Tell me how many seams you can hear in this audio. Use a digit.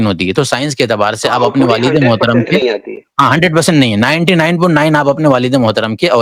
0